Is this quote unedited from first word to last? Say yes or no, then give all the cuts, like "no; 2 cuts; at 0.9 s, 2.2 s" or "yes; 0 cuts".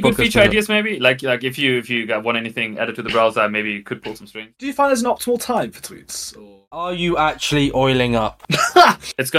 no; 2 cuts; at 4.5 s, 6.6 s